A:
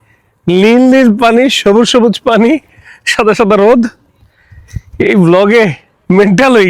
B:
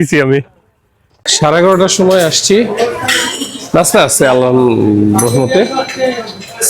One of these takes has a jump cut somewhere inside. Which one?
B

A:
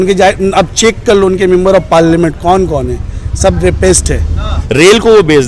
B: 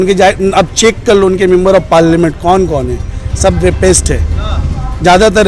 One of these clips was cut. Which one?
A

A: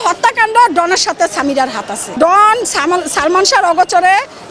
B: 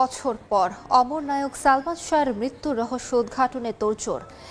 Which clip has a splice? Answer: A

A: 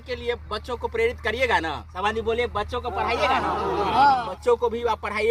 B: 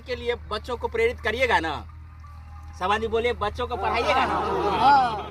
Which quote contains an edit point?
A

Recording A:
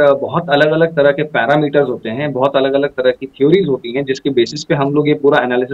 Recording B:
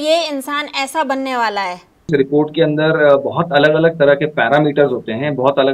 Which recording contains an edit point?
B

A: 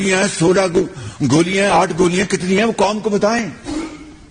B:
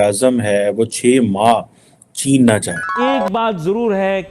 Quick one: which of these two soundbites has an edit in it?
B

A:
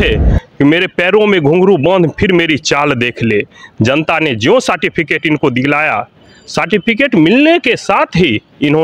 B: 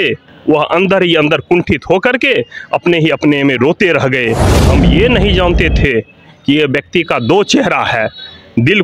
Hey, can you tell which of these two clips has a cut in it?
B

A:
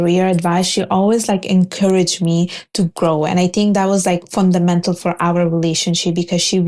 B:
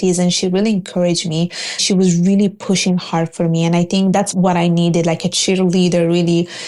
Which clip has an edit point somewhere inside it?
B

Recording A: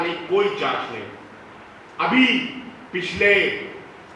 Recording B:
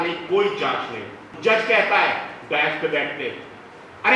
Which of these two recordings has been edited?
B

